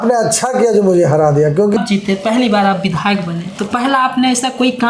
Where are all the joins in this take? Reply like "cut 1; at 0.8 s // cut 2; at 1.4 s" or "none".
cut 1; at 1.7 s